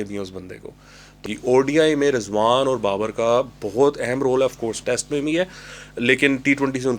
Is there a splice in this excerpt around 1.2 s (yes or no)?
yes